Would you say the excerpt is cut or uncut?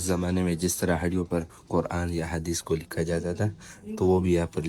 uncut